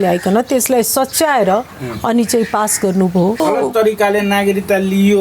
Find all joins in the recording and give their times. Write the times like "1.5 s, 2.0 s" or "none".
3.4 s